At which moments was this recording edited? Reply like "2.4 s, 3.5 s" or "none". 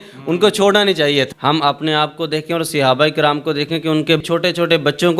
1.3 s, 4.2 s